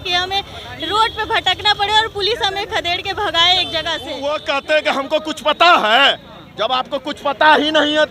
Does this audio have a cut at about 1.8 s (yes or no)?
no